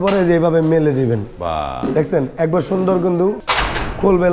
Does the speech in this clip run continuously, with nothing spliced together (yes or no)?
no